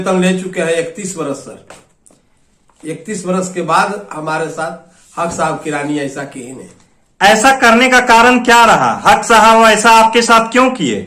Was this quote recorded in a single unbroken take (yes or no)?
yes